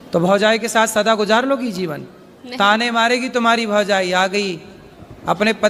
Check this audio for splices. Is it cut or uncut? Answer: uncut